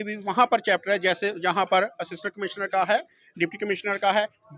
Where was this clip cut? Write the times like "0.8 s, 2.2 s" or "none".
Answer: none